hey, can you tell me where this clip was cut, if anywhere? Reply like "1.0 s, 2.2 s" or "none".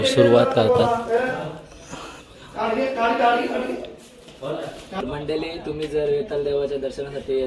5.0 s